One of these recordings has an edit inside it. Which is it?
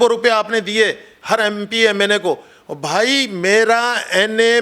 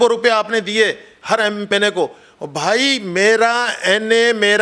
second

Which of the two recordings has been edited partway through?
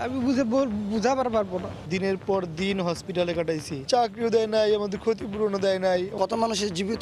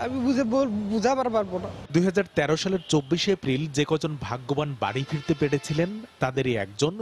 first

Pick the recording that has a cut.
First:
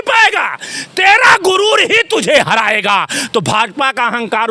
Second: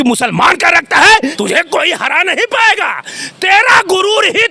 second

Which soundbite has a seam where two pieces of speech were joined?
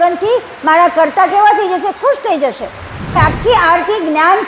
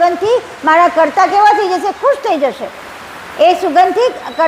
first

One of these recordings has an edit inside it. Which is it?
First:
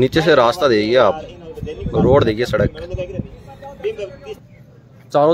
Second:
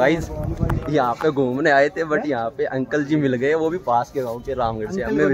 first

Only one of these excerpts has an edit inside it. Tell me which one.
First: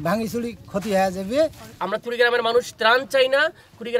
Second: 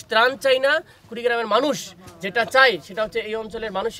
first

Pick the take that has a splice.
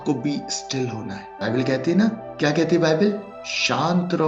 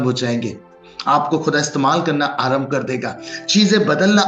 first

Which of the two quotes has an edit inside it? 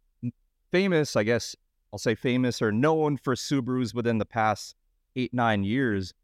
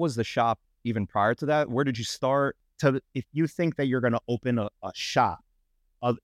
second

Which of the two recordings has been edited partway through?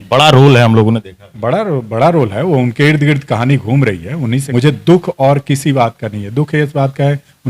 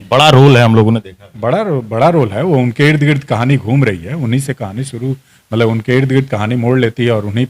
first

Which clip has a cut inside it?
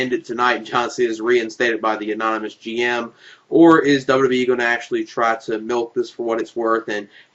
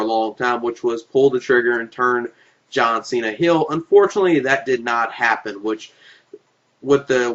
second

